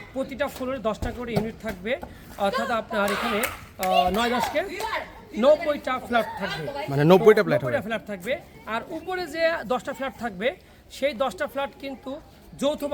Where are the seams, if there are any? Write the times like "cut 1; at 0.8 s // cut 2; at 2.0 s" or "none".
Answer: none